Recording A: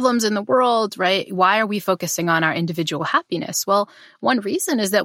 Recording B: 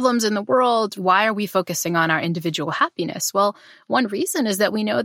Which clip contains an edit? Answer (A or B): B